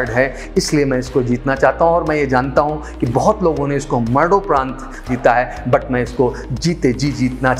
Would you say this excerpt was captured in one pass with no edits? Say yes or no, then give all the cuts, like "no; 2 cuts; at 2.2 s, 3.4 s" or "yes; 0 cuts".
no; 1 cut; at 5.0 s